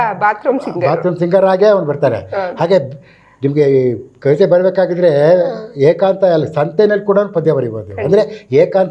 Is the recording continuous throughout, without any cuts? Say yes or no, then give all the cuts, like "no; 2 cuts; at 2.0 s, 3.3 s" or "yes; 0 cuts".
yes; 0 cuts